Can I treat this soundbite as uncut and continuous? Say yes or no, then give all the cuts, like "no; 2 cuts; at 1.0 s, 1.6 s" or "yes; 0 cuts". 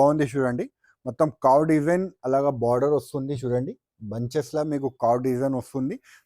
yes; 0 cuts